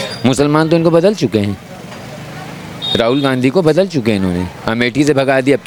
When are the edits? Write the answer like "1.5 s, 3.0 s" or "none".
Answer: none

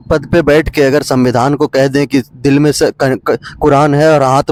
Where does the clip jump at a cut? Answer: none

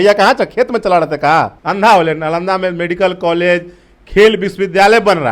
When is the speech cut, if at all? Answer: 1.6 s

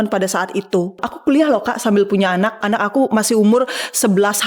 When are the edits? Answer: 1.1 s, 2.6 s

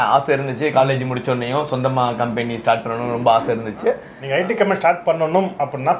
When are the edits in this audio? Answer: 4.1 s

